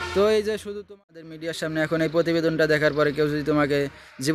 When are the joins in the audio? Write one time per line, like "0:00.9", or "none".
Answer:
0:01.0